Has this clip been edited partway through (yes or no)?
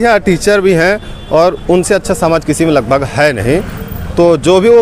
no